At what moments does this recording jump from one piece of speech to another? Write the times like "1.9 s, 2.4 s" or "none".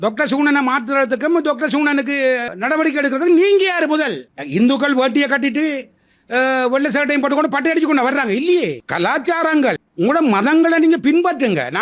2.5 s, 4.3 s

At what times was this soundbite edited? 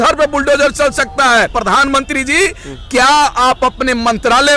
1.5 s

